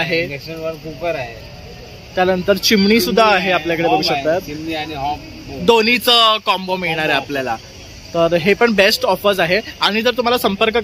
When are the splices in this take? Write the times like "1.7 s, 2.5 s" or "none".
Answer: none